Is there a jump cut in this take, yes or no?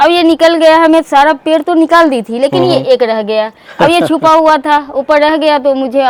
no